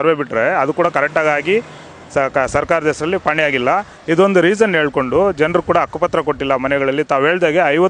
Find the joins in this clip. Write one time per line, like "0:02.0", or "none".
none